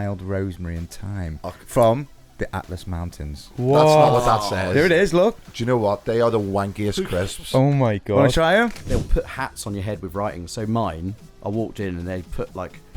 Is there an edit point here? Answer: yes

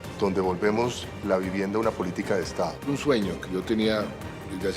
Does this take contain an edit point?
yes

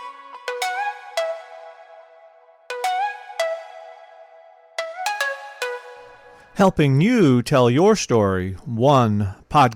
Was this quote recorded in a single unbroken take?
yes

